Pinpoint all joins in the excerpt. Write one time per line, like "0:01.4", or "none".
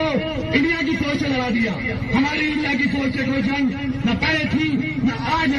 none